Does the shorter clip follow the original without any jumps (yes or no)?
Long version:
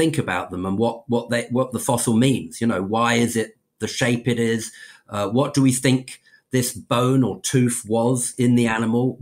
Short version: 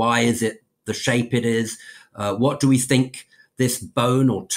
yes